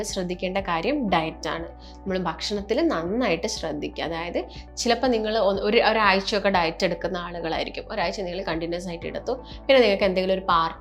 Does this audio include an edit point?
no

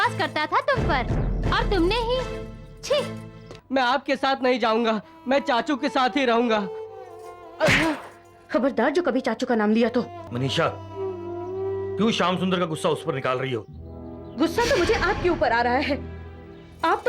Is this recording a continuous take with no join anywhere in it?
no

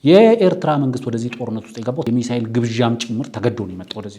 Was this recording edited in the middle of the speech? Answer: yes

